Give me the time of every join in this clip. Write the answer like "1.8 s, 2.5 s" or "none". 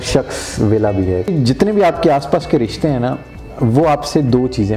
1.3 s